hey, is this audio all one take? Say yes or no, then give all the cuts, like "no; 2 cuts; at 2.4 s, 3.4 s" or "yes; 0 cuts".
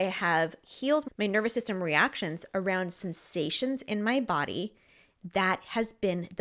no; 1 cut; at 1.1 s